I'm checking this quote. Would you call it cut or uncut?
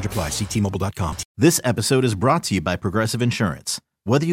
cut